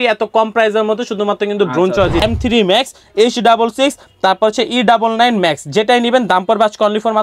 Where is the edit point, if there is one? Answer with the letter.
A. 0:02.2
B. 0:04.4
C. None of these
A